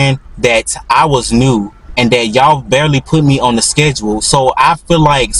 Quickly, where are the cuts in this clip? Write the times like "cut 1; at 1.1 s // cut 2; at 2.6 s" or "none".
none